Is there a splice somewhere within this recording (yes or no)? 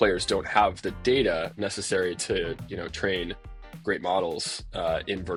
no